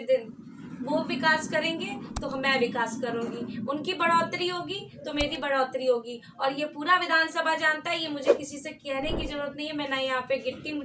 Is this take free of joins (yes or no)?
yes